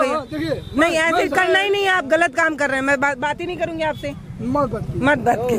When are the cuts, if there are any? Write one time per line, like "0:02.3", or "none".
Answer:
none